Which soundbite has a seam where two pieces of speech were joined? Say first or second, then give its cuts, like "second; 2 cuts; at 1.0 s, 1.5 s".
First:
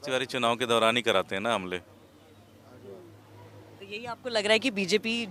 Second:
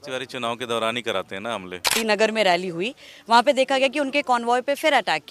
second; 1 cut; at 1.9 s